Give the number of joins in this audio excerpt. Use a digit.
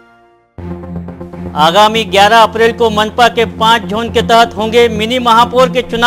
0